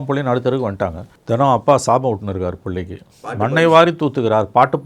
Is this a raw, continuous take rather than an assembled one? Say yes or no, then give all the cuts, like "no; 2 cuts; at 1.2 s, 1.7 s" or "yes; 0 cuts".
no; 1 cut; at 1.1 s